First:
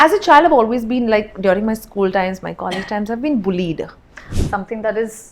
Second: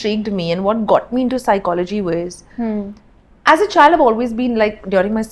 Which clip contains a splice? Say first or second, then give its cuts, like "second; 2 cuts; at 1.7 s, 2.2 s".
first; 1 cut; at 4.3 s